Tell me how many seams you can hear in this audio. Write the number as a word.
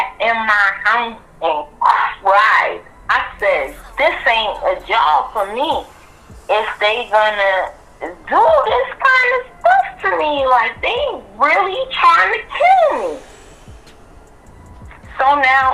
zero